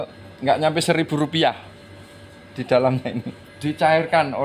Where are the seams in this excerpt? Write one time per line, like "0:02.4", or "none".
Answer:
0:03.5